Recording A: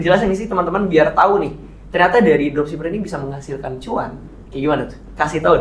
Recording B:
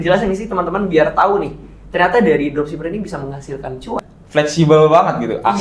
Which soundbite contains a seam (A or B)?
B